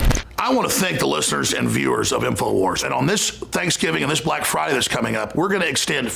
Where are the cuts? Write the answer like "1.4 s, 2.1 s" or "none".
2.8 s